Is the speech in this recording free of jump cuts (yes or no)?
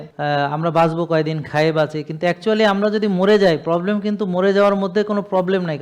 yes